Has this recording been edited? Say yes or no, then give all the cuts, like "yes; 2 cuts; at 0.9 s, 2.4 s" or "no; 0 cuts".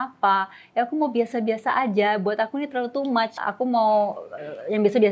yes; 1 cut; at 3.4 s